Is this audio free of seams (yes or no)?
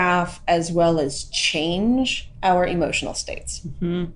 no